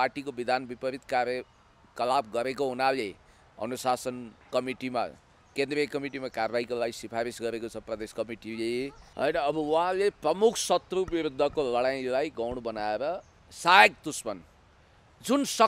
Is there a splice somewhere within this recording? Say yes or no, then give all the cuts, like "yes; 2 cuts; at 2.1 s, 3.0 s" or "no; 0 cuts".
yes; 1 cut; at 9.0 s